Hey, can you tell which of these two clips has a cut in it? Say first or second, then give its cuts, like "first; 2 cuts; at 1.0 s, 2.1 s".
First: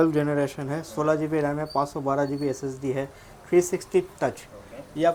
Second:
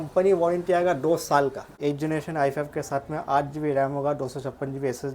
second; 1 cut; at 1.7 s